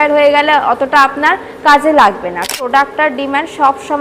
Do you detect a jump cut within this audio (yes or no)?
yes